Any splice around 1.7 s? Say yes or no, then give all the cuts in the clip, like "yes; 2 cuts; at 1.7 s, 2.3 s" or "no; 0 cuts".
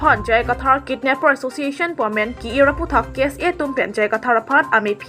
no; 0 cuts